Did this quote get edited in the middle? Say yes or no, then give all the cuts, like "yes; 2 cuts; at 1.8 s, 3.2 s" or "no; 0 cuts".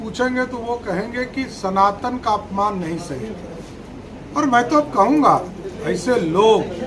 no; 0 cuts